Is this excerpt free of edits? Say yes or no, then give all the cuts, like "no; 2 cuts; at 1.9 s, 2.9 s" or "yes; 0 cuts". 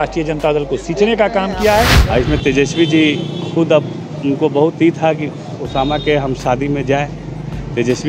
no; 1 cut; at 2.0 s